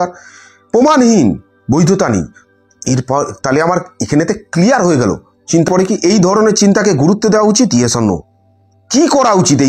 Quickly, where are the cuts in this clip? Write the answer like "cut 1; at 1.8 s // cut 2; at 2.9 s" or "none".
cut 1; at 5.7 s

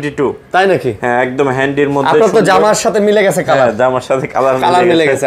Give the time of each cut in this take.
none

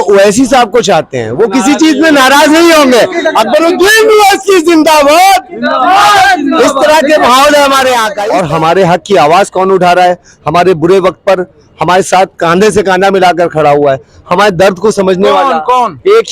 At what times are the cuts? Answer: cut 1; at 8.2 s

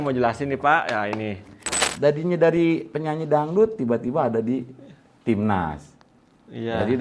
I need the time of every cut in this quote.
cut 1; at 1.9 s

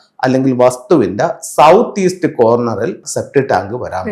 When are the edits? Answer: cut 1; at 3.1 s

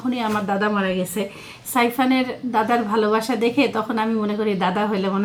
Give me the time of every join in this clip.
none

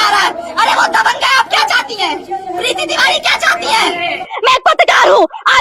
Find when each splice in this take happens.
cut 1; at 4.3 s

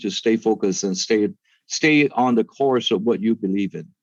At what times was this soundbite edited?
none

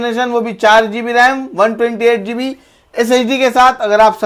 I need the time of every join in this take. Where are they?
none

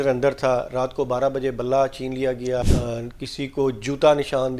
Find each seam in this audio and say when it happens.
cut 1; at 2.6 s

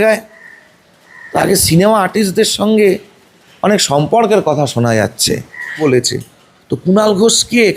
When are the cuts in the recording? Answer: cut 1; at 5.8 s

